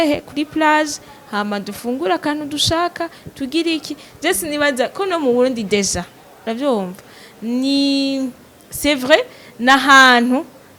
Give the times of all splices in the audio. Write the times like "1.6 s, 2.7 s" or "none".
none